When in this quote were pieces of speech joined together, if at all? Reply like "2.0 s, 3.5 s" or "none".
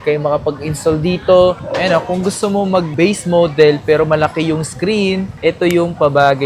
1.6 s